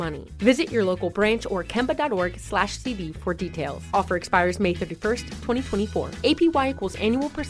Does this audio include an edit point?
no; 0 cuts

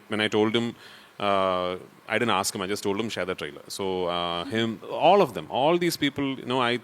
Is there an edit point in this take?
no; 0 cuts

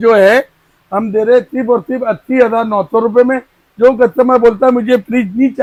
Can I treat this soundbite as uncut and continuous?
yes; 0 cuts

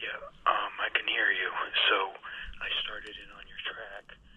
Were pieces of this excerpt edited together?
no; 0 cuts

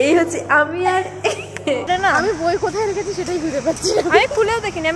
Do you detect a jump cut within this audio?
yes; 1 cut; at 1.9 s

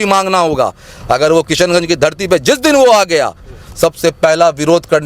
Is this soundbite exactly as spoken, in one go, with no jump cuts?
yes; 0 cuts

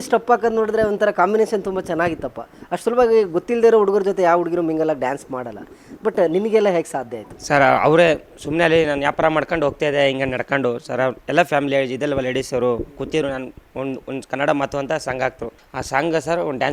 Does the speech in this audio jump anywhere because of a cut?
no; 0 cuts

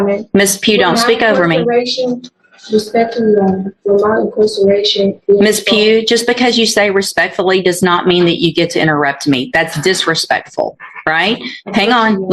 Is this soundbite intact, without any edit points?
yes; 0 cuts

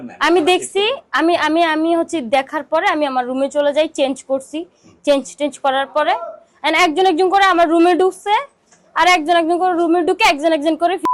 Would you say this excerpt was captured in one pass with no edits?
yes; 0 cuts

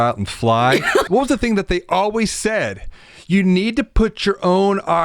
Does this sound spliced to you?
yes; 1 cut; at 1.1 s

